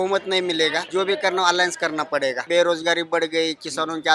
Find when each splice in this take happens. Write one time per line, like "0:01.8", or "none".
0:00.8
0:02.4

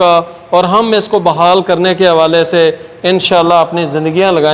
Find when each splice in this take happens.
none

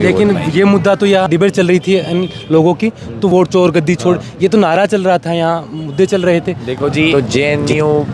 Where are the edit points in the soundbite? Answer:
0:01.3
0:03.3
0:07.1

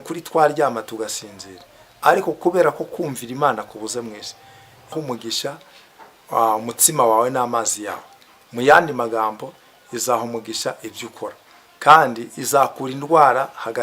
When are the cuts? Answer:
0:04.9

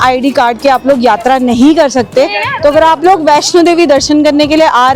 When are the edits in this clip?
none

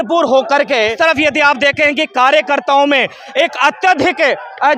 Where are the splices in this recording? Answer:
0:00.9

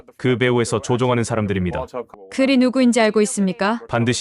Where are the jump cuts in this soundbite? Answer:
0:02.0

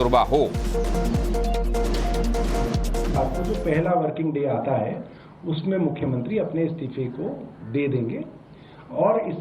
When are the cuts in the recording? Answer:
0:04.2

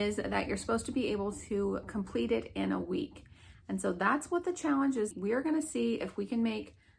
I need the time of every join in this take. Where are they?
0:05.2

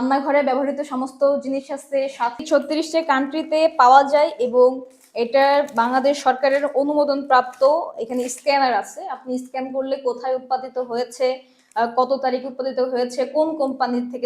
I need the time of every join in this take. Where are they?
0:02.4

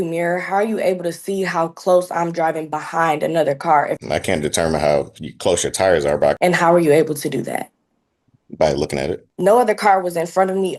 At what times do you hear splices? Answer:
0:04.0
0:06.4
0:09.3

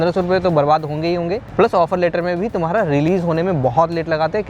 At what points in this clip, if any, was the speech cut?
0:01.4

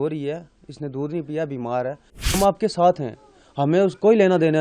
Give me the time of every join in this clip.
0:02.4

